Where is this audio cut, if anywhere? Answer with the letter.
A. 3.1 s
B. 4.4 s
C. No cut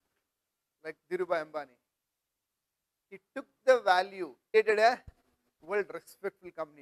B